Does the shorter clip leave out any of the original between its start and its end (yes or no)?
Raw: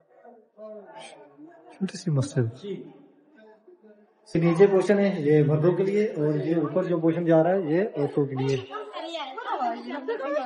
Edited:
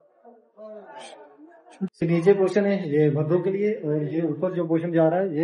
yes